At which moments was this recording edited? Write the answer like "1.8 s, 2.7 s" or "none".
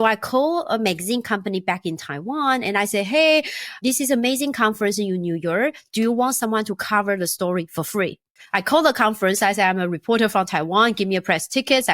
3.8 s, 8.3 s